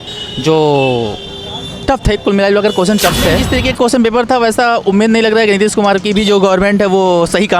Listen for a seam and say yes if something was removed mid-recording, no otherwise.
yes